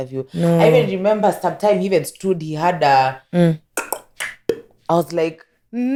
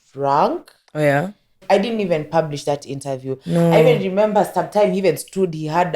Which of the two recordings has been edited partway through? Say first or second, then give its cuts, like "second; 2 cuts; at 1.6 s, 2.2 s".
second; 1 cut; at 1.6 s